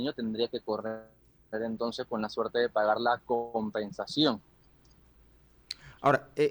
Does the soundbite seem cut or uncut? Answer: uncut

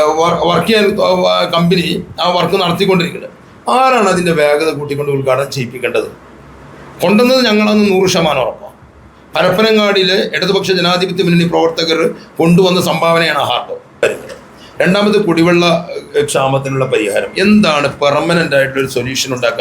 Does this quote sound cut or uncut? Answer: cut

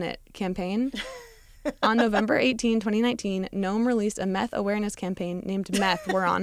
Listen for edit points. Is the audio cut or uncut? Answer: uncut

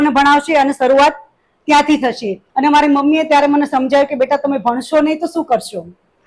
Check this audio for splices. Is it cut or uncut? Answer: cut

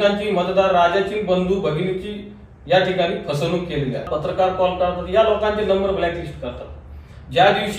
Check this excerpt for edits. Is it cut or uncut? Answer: cut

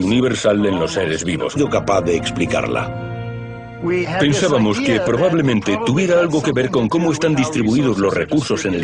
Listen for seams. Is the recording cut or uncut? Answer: uncut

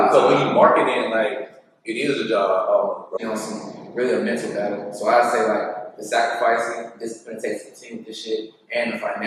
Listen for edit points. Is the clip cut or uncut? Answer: cut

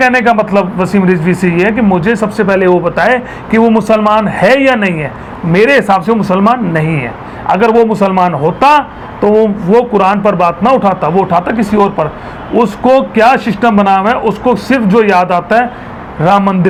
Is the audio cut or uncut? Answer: uncut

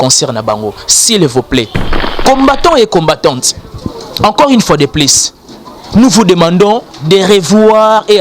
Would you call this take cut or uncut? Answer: cut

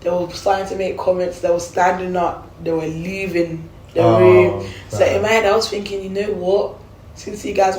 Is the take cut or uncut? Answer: uncut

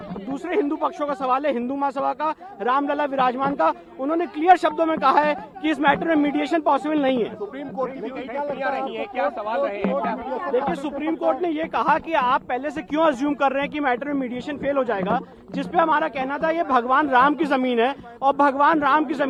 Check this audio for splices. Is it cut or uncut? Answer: uncut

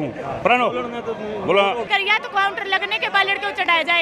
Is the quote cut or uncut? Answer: cut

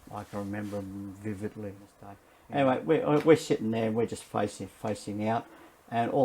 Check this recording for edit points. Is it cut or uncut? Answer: cut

